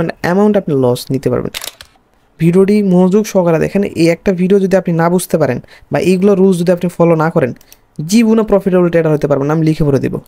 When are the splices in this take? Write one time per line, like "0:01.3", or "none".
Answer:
0:01.6